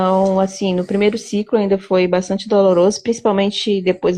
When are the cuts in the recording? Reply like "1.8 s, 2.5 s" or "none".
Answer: none

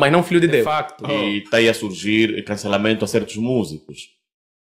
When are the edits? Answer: 1.0 s

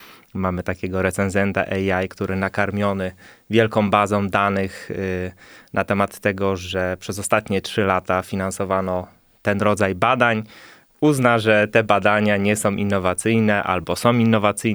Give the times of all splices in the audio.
none

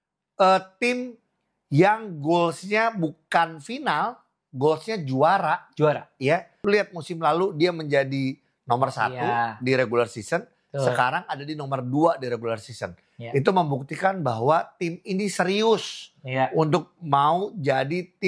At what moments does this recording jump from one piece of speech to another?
6.5 s

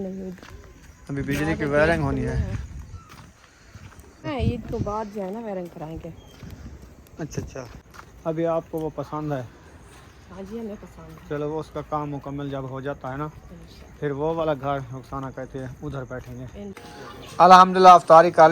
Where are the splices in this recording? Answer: 4.3 s, 7.7 s, 16.8 s

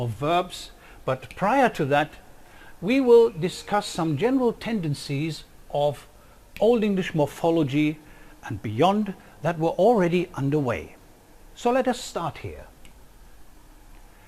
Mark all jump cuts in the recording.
12.4 s

